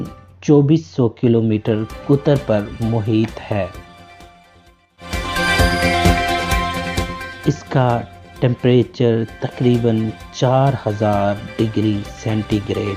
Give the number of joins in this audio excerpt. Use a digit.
0